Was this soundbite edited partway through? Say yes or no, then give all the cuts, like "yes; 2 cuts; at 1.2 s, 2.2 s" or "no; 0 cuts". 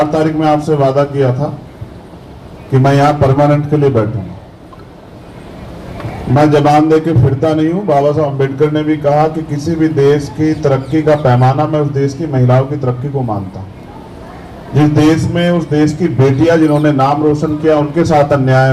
no; 0 cuts